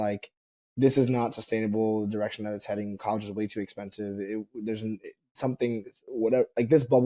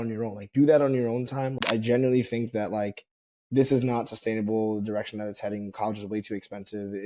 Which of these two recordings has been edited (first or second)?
second